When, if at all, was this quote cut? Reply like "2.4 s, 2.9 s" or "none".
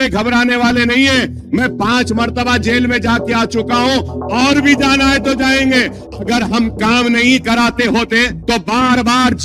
6.0 s, 8.4 s

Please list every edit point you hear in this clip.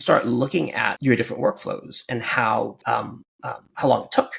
0.9 s, 2.7 s

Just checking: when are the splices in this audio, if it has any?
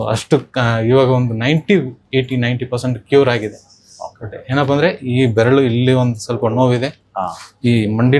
none

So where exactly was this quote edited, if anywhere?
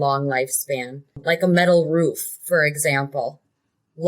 1.2 s

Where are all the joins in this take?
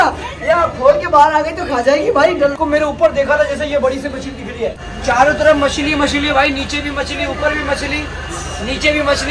2.5 s, 4.9 s

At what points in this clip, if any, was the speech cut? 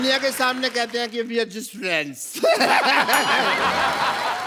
none

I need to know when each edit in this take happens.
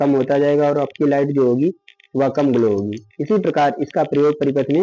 none

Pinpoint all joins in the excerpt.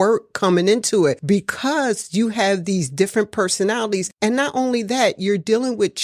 1.2 s, 4.1 s

